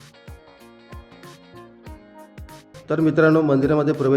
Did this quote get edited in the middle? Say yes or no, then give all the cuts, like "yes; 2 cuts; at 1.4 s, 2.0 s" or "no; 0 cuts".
yes; 1 cut; at 2.7 s